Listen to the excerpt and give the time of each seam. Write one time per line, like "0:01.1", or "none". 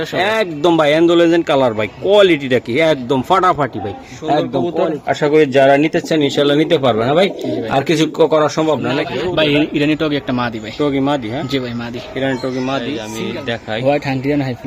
0:04.7
0:09.1
0:13.1